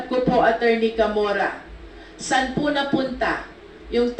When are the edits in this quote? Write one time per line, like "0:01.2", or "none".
none